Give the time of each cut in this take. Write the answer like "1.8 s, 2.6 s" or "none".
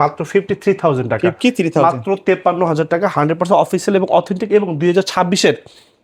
none